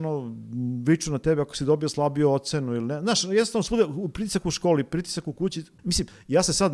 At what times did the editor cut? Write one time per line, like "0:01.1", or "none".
0:05.7